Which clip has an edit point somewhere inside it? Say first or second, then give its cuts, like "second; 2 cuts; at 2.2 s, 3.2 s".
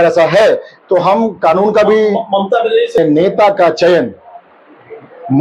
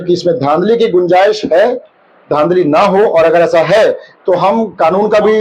first; 1 cut; at 3.0 s